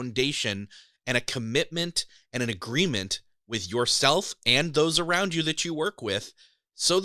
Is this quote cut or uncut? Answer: uncut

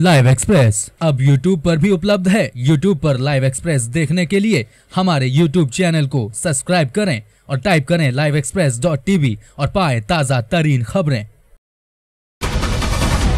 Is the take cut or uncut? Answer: cut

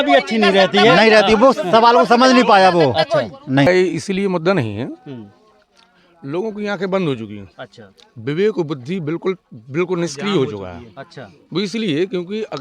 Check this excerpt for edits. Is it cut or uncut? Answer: cut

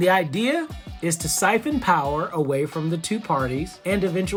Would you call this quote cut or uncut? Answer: uncut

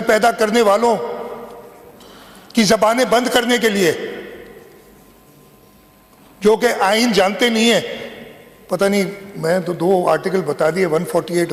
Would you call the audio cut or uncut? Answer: uncut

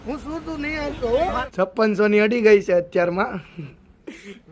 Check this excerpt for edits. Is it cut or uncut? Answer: cut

